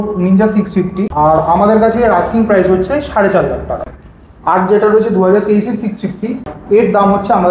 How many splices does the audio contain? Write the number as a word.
three